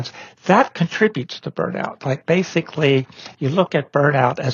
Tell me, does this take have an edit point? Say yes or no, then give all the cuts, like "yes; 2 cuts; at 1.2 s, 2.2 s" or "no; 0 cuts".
no; 0 cuts